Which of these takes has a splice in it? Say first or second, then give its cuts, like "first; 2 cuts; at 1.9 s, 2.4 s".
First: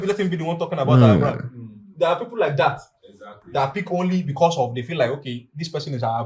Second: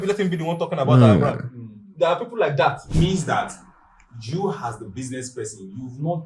second; 1 cut; at 2.8 s